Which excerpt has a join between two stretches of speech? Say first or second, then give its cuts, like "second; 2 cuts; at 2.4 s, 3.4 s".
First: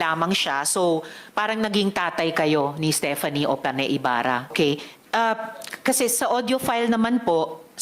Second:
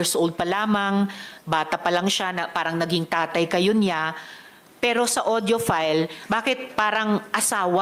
first; 1 cut; at 4.5 s